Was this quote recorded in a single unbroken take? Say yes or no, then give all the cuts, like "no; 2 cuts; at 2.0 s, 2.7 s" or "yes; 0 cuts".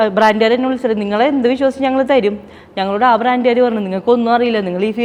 yes; 0 cuts